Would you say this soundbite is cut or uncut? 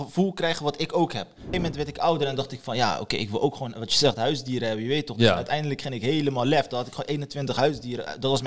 cut